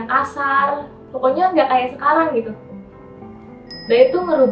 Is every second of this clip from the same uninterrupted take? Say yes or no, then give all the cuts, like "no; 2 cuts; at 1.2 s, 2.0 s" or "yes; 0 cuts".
yes; 0 cuts